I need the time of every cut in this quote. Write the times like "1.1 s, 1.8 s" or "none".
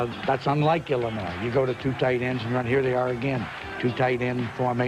none